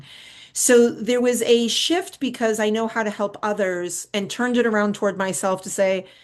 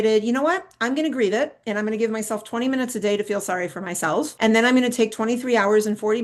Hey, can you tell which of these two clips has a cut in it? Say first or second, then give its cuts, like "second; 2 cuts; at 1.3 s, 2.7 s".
second; 1 cut; at 4.3 s